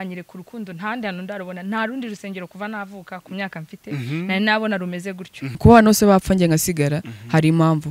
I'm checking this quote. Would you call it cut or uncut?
cut